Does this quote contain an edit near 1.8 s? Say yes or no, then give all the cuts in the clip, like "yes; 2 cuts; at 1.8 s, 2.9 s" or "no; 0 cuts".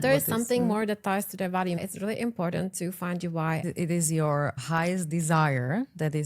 yes; 2 cuts; at 1.8 s, 3.6 s